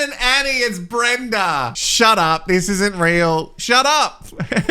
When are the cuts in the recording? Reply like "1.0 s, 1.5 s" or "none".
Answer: 1.8 s